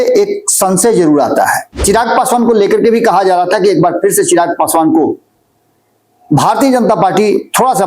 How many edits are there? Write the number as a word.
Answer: one